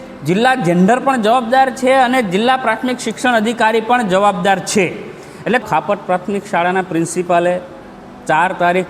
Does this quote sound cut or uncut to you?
cut